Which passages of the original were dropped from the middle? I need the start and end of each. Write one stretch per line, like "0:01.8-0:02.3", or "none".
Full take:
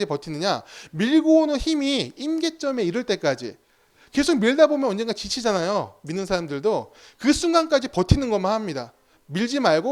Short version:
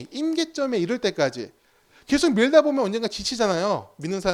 none

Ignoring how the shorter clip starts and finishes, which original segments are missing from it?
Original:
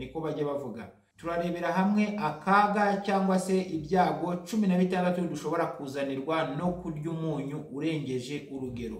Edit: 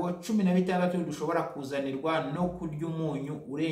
none

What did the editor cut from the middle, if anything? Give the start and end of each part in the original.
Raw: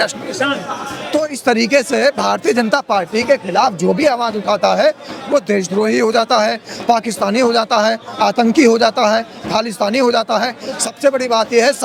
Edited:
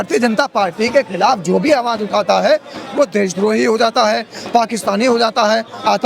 none

